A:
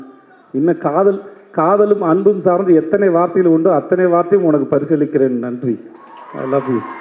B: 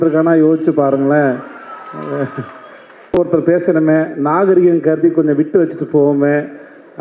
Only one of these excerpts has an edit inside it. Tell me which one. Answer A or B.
B